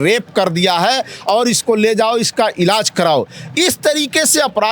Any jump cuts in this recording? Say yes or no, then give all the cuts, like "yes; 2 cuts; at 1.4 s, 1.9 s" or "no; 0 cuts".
no; 0 cuts